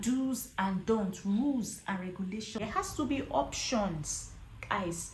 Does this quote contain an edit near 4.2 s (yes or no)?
no